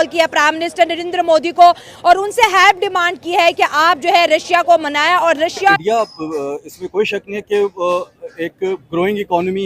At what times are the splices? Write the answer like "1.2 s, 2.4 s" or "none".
5.7 s